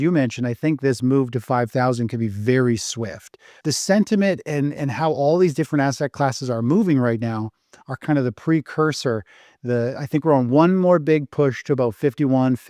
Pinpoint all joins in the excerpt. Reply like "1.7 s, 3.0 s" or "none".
3.5 s

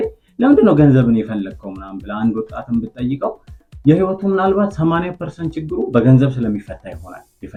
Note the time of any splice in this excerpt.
none

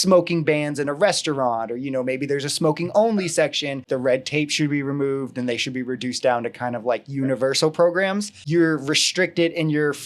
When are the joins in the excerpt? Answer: 3.9 s, 8.3 s

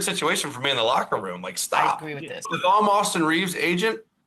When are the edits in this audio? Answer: 2.5 s

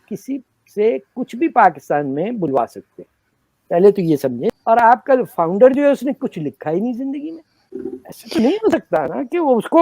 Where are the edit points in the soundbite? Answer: 4.5 s, 7.8 s

